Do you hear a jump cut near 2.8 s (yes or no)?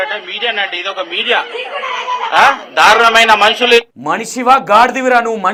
no